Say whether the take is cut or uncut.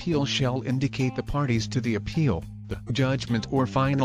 cut